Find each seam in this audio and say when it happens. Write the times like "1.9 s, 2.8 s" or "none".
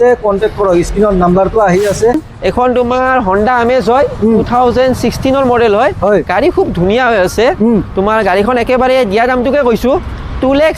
2.3 s